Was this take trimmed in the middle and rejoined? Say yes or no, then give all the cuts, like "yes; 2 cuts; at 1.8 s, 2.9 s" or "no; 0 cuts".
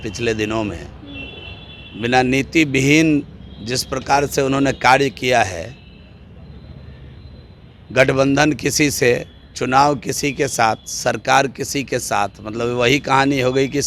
no; 0 cuts